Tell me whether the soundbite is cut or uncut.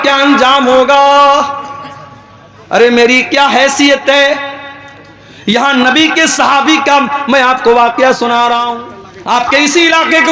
cut